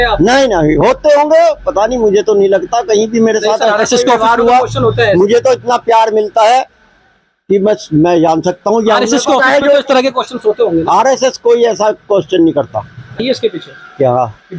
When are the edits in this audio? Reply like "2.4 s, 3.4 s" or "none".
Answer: 13.2 s